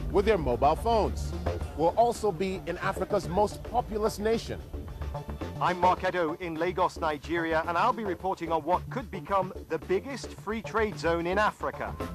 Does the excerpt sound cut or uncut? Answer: uncut